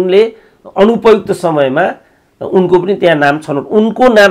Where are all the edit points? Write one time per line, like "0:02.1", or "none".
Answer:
none